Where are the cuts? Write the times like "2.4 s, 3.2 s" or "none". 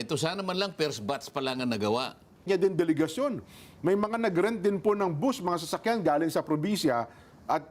2.5 s